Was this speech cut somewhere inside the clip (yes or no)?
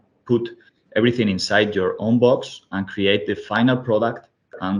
no